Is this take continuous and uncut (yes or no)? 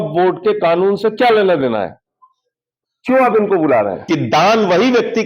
no